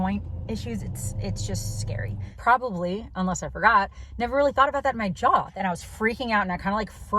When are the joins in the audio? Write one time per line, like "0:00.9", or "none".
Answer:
0:02.2
0:05.5

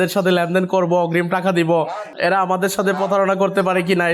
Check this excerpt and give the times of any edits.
0:02.0

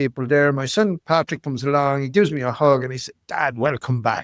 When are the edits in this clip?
0:01.0

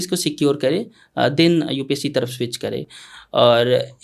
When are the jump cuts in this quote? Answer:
none

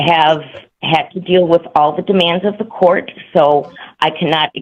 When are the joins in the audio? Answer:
none

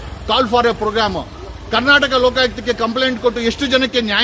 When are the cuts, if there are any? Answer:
none

